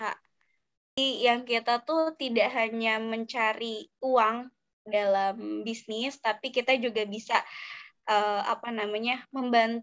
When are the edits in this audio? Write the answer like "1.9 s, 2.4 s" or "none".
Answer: 1.0 s